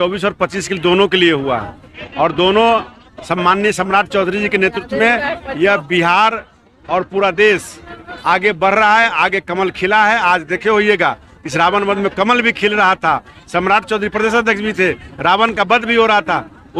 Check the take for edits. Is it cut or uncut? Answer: uncut